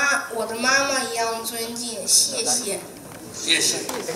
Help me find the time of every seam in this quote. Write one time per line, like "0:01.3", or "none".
none